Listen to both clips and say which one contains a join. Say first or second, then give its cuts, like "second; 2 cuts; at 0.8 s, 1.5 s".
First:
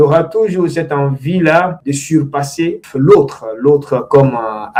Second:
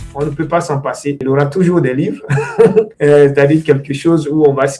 second; 1 cut; at 1.2 s